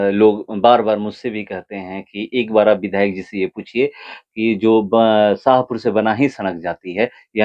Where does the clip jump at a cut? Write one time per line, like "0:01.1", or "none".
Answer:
none